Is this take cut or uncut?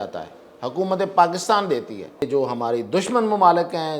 cut